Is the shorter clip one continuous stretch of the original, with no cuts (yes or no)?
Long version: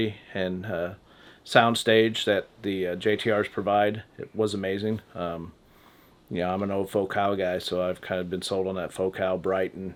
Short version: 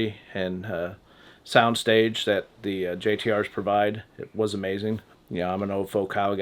no